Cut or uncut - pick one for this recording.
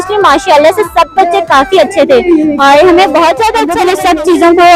cut